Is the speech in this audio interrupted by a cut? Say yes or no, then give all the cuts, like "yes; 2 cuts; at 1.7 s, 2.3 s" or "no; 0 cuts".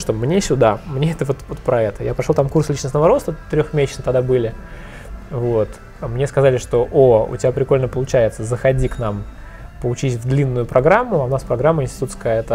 no; 0 cuts